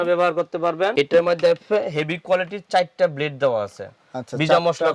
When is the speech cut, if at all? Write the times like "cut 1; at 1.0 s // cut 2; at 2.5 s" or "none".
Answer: cut 1; at 0.9 s